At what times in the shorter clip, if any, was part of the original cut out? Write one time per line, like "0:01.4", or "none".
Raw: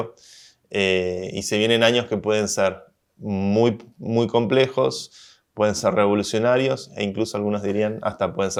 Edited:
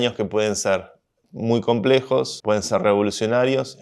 0:01.2
0:02.3

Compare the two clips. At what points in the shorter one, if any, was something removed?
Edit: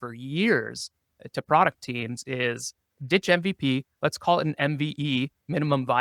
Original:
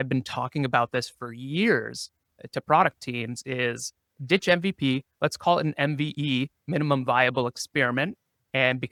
none

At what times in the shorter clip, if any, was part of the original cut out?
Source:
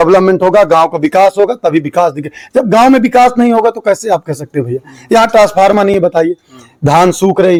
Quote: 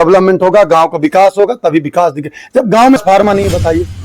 0:03.0

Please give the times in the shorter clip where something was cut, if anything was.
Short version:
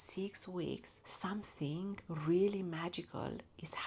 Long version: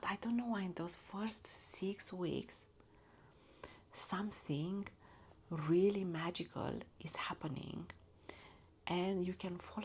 0:01.0
0:02.0

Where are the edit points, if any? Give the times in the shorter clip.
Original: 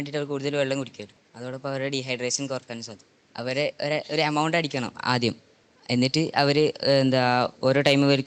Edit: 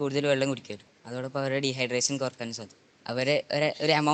none

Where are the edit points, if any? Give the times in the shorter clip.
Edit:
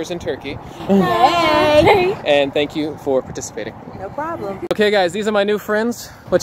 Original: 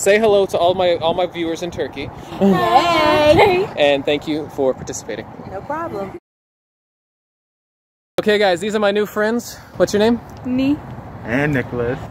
0:04.7

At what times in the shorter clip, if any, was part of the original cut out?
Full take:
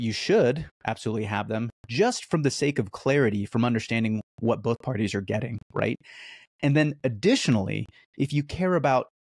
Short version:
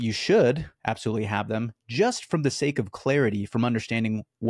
none

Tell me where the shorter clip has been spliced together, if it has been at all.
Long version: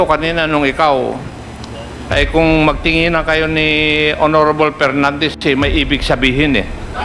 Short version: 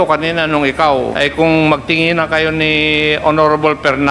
0:01.1

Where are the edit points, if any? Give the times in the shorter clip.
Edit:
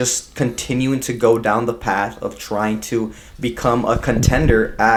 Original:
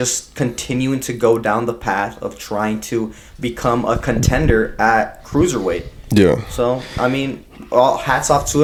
none

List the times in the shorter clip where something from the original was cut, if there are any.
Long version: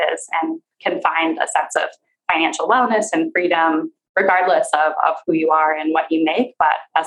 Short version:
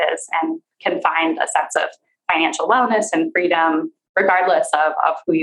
none

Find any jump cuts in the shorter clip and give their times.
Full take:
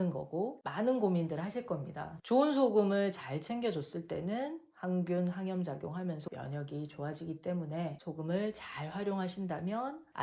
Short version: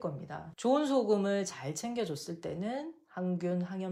none

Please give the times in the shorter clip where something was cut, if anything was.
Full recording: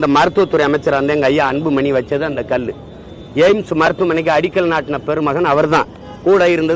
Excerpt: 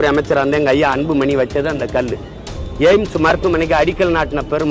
none

